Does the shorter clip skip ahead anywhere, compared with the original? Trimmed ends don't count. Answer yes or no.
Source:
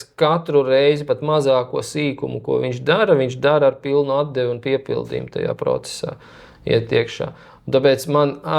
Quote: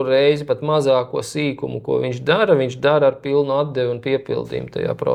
no